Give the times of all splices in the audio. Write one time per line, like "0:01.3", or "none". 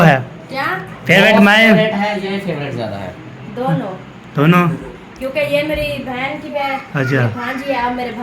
0:02.2
0:06.8

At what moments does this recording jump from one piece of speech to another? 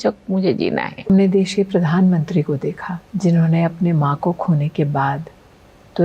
0:01.1

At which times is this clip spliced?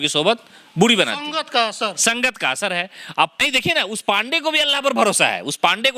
0:03.4

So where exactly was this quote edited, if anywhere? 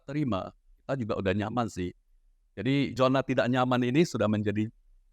0:02.9

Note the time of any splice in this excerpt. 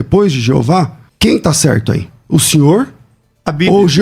0:01.0

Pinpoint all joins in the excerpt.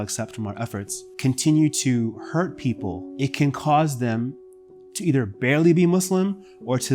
0:01.0
0:03.0

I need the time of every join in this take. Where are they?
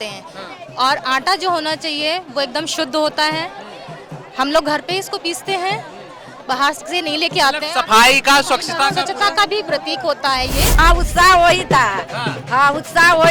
0:10.8

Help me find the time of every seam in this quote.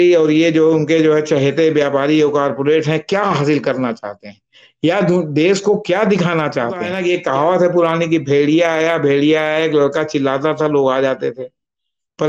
0:06.9

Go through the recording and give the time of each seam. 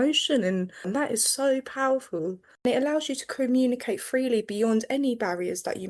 0:00.9
0:02.7

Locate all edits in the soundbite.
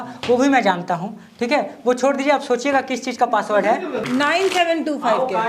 0:04.0

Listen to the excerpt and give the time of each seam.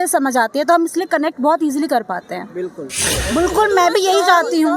0:03.1

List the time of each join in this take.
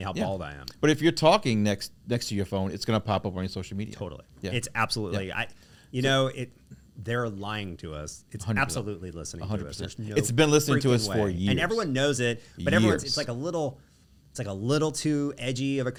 none

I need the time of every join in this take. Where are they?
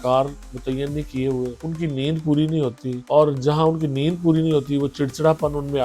0:01.6
0:02.9

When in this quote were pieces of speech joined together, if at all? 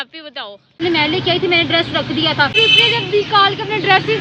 0:00.8
0:02.6

